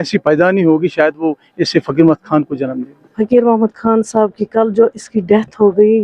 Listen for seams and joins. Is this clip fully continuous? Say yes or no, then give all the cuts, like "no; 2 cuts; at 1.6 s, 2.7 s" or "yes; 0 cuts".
no; 1 cut; at 3.1 s